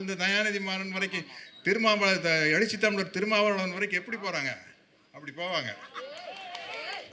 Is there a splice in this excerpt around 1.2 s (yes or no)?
no